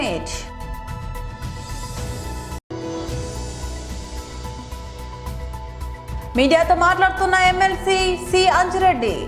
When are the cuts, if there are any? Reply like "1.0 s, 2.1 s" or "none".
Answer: 2.6 s, 5.0 s, 6.3 s